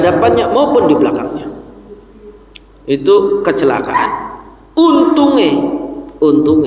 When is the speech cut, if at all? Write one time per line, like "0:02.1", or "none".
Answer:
none